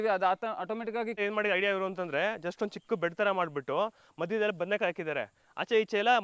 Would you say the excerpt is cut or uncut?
cut